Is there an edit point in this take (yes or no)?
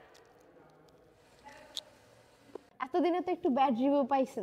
yes